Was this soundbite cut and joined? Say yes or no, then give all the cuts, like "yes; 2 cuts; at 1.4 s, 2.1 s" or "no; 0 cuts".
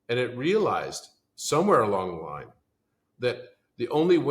no; 0 cuts